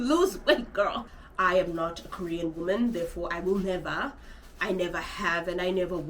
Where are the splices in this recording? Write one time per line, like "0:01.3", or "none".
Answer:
0:01.0